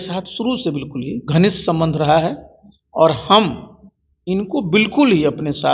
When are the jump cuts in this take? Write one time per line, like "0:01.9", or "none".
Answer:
0:01.2